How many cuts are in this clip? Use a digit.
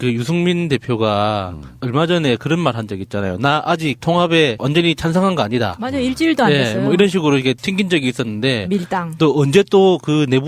1